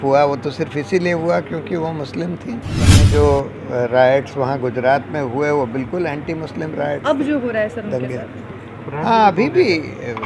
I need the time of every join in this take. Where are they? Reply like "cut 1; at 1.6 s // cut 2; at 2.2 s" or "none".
cut 1; at 3.0 s